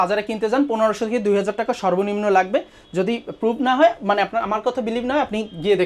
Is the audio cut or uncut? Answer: uncut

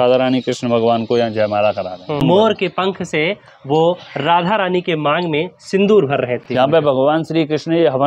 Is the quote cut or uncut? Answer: cut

